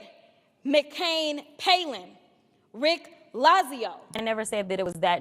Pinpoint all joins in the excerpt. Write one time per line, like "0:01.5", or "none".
0:04.2